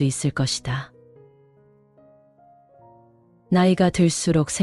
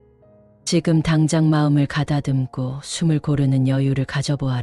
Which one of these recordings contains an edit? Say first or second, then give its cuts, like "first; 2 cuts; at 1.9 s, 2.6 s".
first; 2 cuts; at 0.9 s, 3.4 s